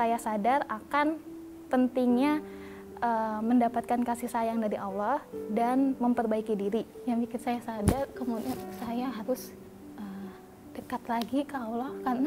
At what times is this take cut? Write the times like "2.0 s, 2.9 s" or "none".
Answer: 6.9 s, 10.0 s